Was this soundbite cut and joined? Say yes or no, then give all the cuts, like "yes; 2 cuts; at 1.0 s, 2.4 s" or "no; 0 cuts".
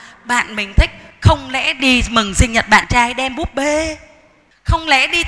no; 0 cuts